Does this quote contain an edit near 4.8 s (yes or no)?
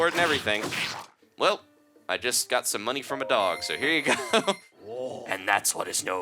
yes